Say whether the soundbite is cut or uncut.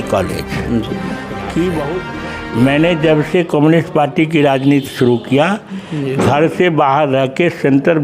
cut